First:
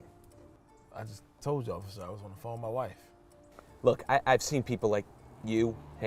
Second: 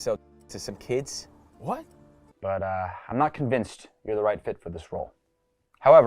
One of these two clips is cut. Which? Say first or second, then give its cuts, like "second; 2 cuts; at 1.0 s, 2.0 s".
second; 1 cut; at 2.3 s